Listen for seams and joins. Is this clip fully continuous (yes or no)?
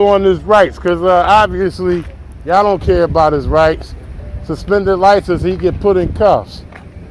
yes